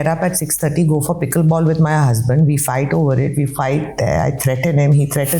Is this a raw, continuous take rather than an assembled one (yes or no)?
yes